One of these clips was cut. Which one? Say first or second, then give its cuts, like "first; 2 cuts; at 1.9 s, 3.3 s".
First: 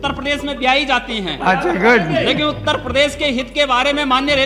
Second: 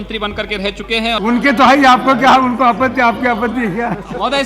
second; 1 cut; at 1.2 s